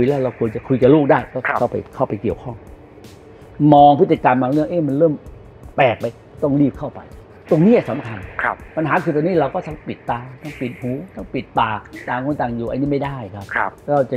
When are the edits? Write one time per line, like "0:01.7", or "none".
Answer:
none